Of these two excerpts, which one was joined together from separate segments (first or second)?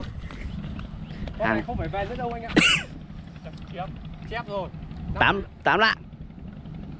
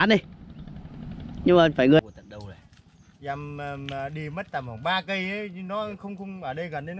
second